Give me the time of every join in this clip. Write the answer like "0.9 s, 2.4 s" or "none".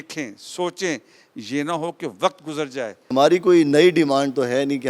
3.1 s